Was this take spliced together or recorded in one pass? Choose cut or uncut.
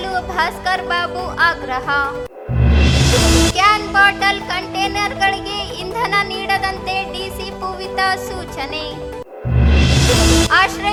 uncut